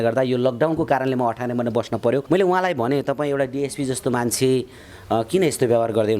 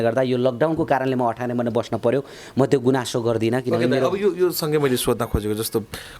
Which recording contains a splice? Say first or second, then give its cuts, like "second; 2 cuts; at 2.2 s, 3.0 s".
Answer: first; 1 cut; at 2.2 s